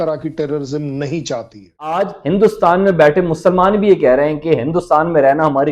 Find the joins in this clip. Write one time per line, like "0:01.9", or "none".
0:01.9